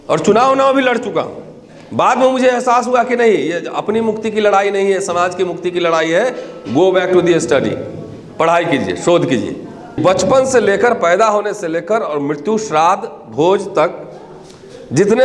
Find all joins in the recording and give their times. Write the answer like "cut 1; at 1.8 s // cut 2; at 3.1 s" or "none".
cut 1; at 10.0 s